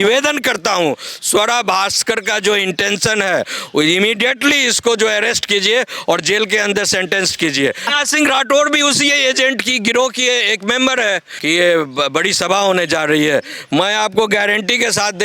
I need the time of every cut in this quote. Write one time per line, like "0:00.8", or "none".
0:07.9
0:11.3